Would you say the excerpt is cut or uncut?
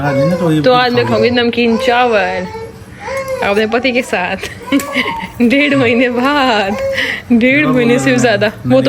uncut